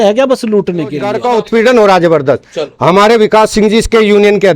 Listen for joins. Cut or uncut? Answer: cut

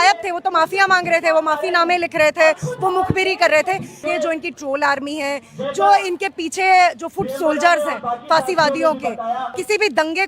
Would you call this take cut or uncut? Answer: cut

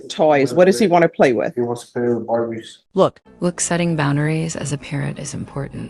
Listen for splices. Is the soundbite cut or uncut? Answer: uncut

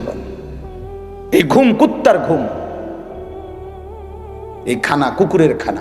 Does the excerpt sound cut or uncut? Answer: uncut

